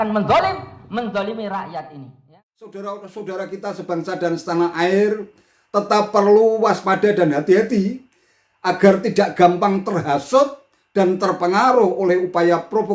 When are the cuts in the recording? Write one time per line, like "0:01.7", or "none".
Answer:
0:02.2